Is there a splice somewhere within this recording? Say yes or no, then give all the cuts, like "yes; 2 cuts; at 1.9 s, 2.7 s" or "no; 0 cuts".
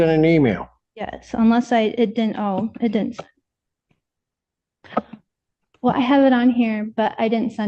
no; 0 cuts